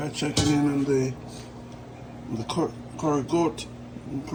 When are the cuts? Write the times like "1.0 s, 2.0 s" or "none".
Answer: none